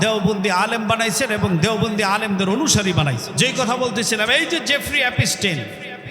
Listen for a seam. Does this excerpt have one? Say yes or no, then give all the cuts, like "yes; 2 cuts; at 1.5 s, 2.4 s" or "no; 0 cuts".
yes; 1 cut; at 3.3 s